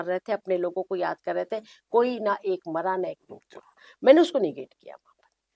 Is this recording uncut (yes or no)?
yes